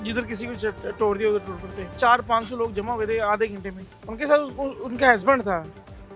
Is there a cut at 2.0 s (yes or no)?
no